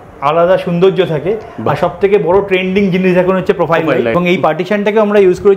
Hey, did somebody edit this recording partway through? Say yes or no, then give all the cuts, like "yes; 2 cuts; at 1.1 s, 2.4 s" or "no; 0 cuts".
yes; 1 cut; at 4.1 s